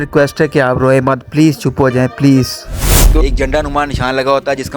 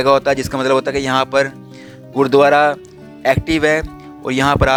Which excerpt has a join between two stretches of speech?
first; 1 cut; at 3.2 s

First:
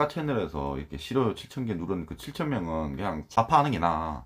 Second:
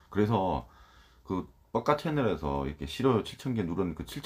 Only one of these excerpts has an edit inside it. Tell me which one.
first; 1 cut; at 3.3 s

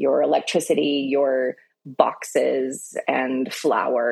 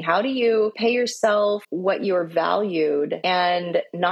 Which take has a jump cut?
second; 3 cuts; at 0.8 s, 1.7 s, 3.2 s

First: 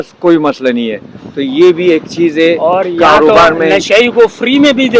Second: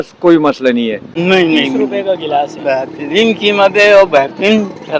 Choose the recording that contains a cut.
second; 1 cut; at 1.1 s

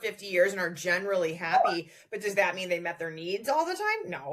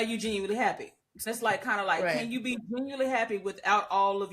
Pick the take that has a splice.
second; 1 cut; at 1.2 s

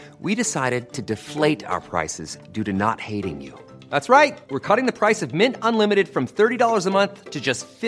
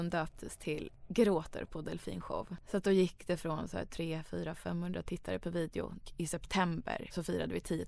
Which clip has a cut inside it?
second; 4 cuts; at 1.0 s, 2.6 s, 6.0 s, 7.1 s

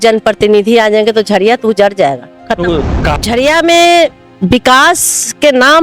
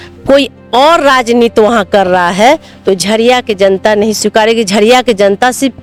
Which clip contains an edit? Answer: first; 1 cut; at 3.1 s

